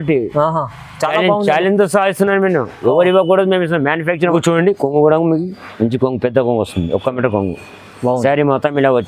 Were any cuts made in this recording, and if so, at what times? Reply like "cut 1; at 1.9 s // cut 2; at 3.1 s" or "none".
cut 1; at 4.3 s